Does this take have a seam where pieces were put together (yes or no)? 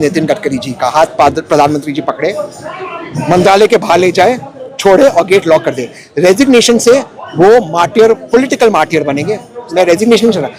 no